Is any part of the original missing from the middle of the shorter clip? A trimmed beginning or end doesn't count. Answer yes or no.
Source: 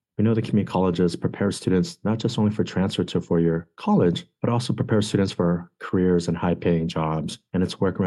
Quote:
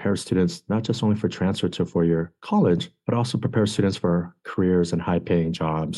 no